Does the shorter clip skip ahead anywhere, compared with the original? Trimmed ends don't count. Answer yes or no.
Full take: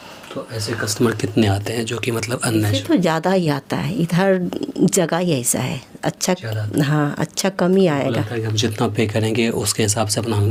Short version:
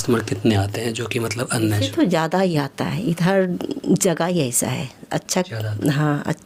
no